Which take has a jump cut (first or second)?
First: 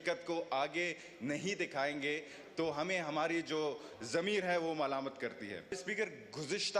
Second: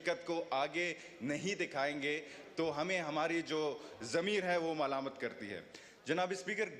first